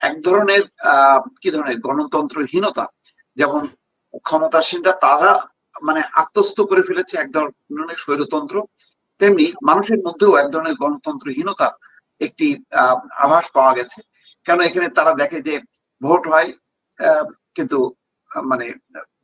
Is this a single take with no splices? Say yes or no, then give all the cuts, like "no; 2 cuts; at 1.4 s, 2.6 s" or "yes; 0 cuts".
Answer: yes; 0 cuts